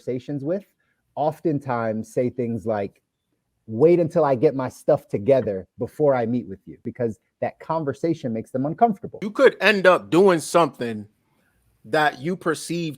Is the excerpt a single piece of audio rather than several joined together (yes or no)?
no